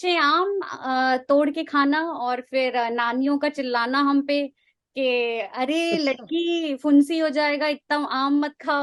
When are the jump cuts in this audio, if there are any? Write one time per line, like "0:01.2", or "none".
none